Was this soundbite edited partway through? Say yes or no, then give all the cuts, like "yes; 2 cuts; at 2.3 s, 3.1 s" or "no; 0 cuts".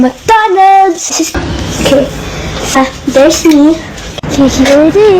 yes; 1 cut; at 1.3 s